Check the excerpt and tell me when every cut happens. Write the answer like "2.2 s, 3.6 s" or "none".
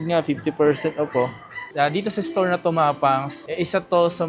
1.6 s